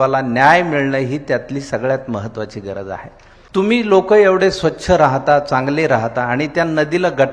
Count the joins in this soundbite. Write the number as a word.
one